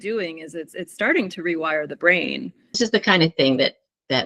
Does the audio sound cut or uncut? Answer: cut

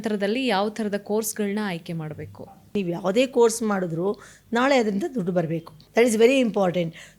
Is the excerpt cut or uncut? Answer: cut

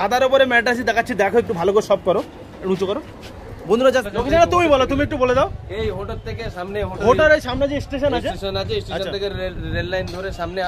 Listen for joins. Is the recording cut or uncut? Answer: cut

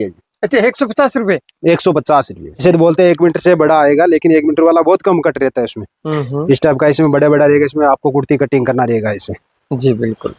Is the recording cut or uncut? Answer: cut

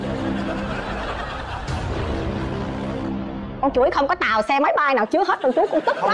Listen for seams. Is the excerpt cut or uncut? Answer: uncut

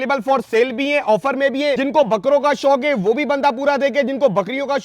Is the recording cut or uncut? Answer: cut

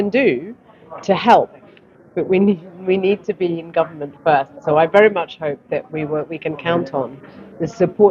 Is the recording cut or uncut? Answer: uncut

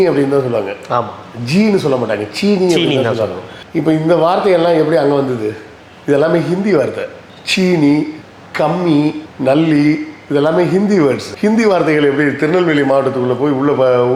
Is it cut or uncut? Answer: uncut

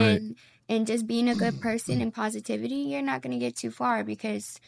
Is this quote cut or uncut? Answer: uncut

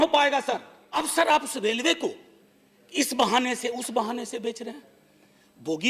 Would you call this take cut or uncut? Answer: cut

